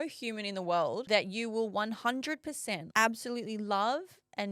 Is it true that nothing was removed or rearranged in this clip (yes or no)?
no